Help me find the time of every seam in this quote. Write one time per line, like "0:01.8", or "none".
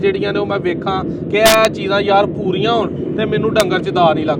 none